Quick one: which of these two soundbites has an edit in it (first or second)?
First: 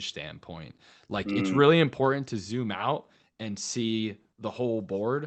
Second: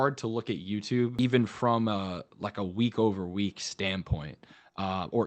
second